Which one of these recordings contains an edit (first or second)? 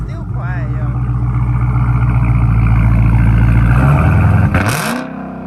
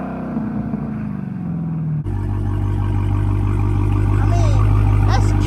second